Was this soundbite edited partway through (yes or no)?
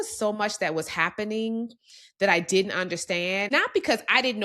yes